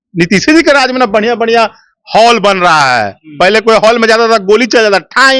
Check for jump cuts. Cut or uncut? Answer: uncut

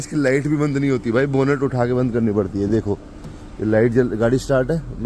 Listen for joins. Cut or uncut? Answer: uncut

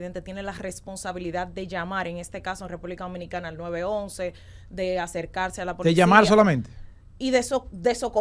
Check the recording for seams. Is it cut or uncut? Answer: uncut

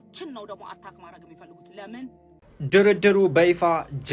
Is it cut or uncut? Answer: cut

